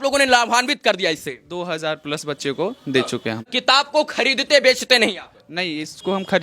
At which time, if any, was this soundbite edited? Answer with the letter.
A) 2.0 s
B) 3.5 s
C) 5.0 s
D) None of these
B